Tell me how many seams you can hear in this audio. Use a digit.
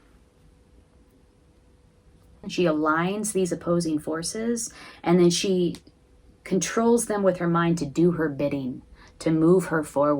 1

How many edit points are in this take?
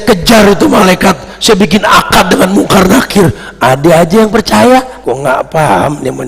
1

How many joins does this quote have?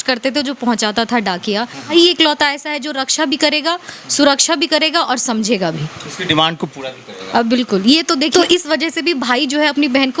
2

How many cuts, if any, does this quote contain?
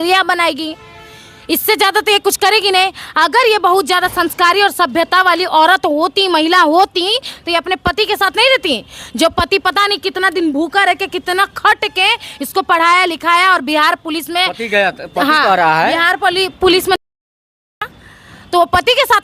0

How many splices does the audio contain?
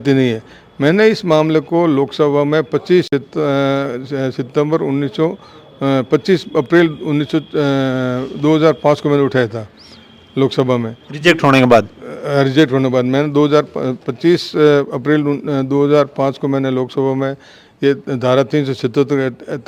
0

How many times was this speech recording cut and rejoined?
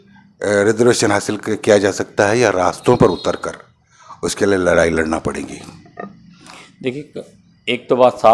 0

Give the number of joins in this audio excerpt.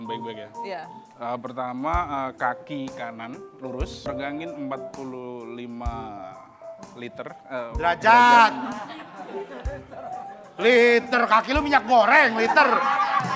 1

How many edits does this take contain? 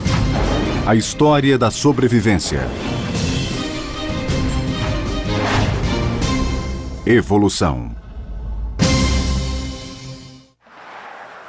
1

